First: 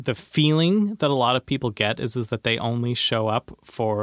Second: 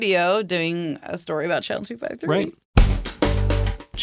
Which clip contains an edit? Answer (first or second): second